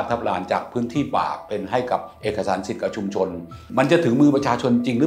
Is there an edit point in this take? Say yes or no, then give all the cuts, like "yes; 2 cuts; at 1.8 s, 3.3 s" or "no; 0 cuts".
yes; 1 cut; at 3.6 s